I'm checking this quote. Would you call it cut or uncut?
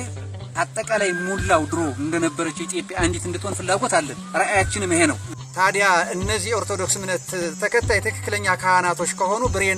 cut